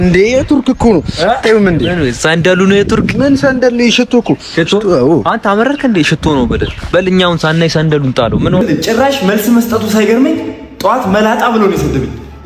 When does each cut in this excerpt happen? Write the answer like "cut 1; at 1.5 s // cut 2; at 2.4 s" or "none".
cut 1; at 8.6 s